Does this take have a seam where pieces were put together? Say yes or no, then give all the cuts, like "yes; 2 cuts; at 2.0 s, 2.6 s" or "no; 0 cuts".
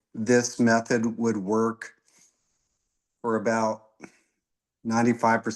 no; 0 cuts